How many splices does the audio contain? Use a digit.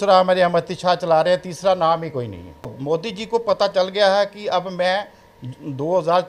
1